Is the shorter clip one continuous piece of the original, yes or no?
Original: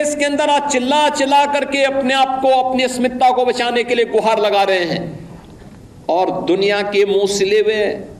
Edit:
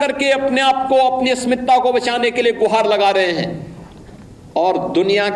yes